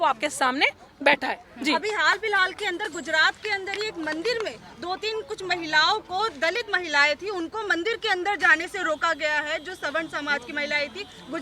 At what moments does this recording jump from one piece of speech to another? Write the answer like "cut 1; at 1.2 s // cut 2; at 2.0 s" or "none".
none